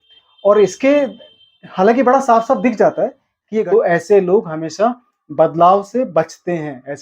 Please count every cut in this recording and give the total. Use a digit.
1